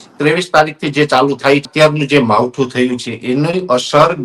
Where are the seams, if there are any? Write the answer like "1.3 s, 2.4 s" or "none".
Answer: 1.7 s